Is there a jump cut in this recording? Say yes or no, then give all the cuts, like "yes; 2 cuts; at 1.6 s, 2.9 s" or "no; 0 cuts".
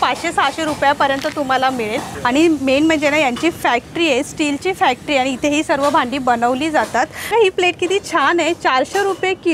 yes; 2 cuts; at 2.0 s, 7.2 s